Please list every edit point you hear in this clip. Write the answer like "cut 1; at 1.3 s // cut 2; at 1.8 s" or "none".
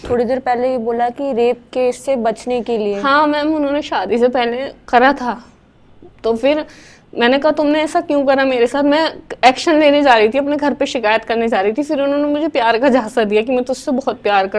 none

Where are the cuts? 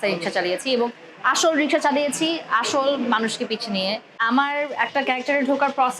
cut 1; at 4.2 s

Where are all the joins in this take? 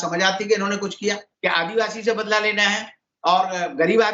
cut 1; at 1.3 s

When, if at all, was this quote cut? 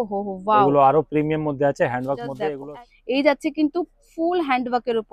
cut 1; at 2.4 s

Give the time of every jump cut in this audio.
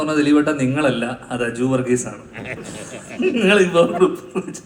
none

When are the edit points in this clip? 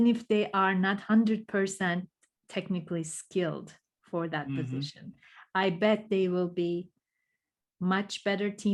none

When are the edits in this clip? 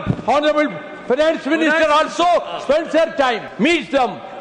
cut 1; at 3.5 s

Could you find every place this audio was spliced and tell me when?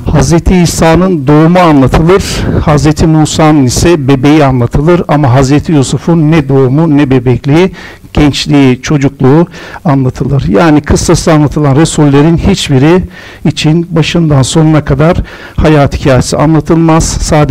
none

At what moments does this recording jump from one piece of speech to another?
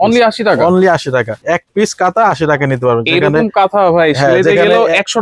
cut 1; at 1.3 s

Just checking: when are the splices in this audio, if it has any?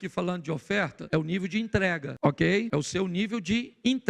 cut 1; at 1.0 s // cut 2; at 2.1 s // cut 3; at 2.7 s

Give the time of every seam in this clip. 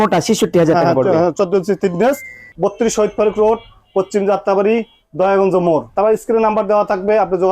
cut 1; at 2.4 s // cut 2; at 5.9 s

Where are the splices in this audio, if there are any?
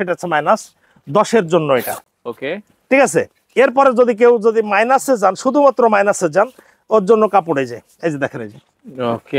none

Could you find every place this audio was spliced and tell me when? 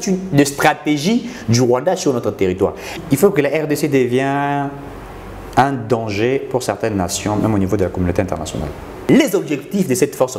cut 1; at 2.9 s // cut 2; at 9.1 s

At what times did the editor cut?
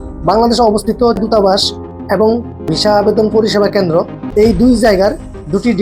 cut 1; at 1.2 s // cut 2; at 2.7 s // cut 3; at 4.2 s

